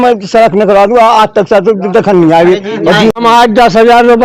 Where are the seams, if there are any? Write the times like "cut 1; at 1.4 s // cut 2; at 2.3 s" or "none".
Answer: cut 1; at 3.2 s